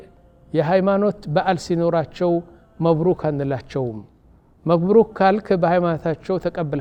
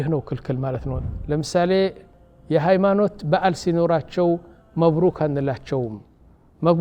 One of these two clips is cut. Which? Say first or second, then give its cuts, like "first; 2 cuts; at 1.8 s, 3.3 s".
second; 1 cut; at 0.9 s